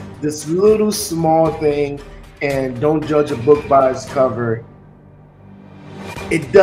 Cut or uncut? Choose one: uncut